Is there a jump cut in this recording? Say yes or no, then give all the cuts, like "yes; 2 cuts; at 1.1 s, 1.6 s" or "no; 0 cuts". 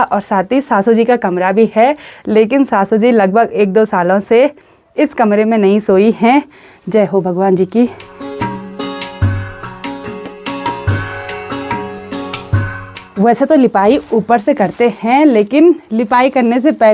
no; 0 cuts